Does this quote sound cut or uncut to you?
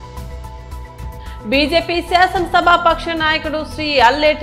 cut